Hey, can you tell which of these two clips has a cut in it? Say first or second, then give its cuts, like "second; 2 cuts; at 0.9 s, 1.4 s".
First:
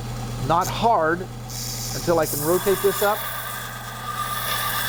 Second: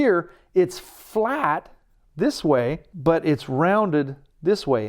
second; 1 cut; at 2.9 s